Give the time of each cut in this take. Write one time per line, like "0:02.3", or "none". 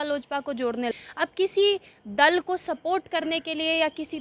0:00.9